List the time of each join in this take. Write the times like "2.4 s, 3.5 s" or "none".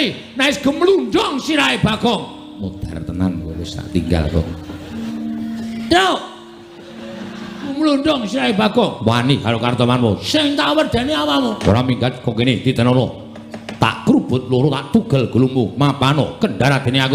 5.1 s, 7.7 s, 11.6 s